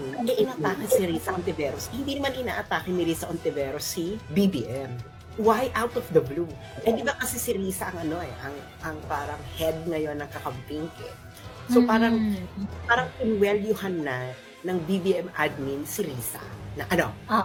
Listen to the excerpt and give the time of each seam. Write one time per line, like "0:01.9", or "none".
none